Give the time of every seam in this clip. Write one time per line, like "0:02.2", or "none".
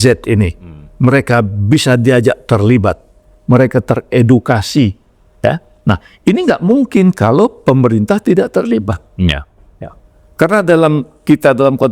none